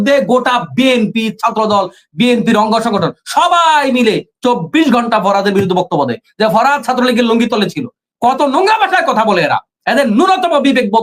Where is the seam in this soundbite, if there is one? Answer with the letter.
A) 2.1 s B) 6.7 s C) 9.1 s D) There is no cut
D